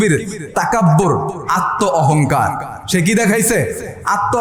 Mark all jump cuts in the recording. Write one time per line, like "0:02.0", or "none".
none